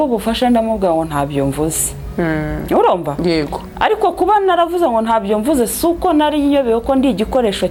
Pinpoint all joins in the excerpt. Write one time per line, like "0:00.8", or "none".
none